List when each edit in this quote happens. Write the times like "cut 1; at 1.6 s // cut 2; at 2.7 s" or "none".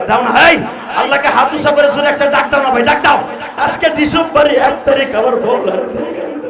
cut 1; at 3.4 s

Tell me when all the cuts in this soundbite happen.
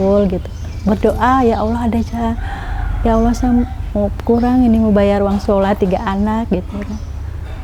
none

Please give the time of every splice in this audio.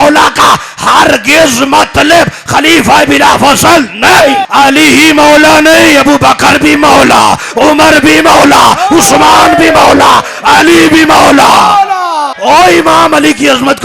cut 1; at 4.5 s // cut 2; at 12.3 s

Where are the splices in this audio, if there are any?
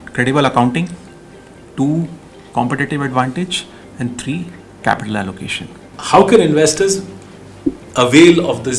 cut 1; at 5.9 s

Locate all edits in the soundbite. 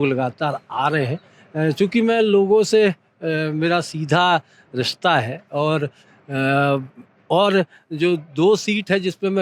cut 1; at 6.0 s

